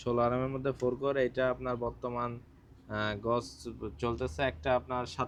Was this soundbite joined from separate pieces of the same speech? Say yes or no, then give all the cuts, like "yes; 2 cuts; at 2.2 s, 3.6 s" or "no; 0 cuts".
no; 0 cuts